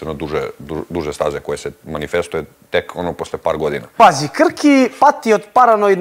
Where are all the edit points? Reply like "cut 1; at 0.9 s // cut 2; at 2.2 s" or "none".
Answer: cut 1; at 3.9 s

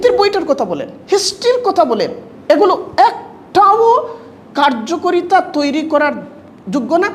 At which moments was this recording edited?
none

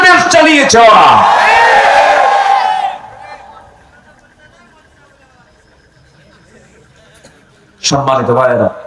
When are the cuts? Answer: none

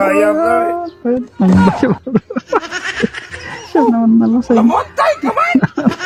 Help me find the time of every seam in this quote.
none

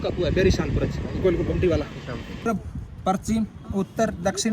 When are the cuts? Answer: cut 1; at 2.5 s

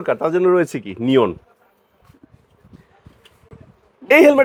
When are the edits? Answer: none

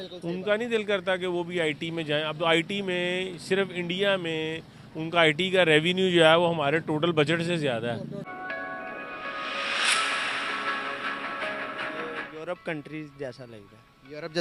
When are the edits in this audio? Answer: cut 1; at 8.3 s

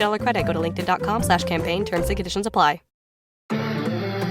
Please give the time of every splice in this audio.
cut 1; at 3.4 s

